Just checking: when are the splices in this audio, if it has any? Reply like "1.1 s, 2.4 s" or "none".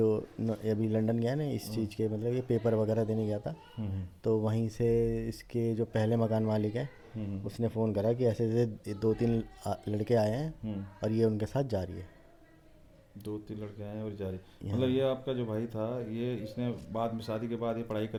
none